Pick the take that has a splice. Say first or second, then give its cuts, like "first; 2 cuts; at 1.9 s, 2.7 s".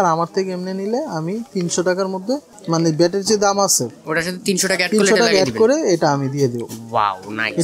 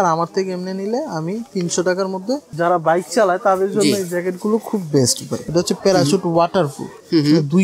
second; 2 cuts; at 2.5 s, 5.4 s